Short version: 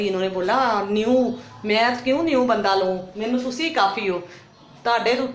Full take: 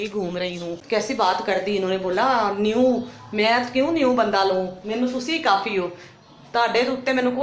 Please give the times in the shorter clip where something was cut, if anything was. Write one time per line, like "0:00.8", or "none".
none